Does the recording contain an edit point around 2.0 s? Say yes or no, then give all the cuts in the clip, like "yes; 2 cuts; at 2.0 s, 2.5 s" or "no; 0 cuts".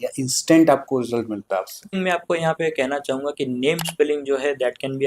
yes; 1 cut; at 2.0 s